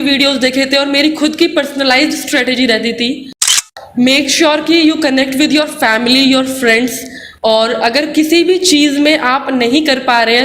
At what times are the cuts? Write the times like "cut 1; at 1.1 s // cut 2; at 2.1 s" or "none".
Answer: cut 1; at 3.7 s